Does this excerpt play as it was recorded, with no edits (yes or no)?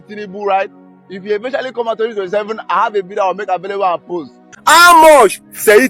no